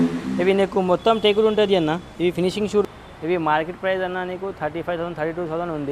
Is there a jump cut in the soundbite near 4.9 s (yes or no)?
no